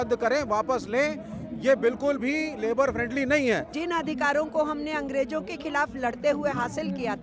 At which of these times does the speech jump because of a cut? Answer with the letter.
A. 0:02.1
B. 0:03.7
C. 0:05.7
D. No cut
B